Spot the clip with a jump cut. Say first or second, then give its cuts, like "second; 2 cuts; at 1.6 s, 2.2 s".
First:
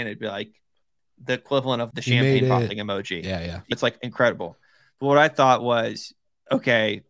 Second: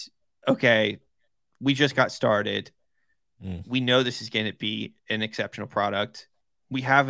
first; 2 cuts; at 1.9 s, 3.7 s